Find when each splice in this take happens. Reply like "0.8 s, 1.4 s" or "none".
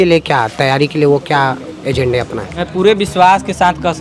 2.6 s